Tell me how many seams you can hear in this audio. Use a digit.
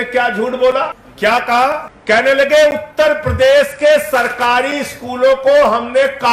2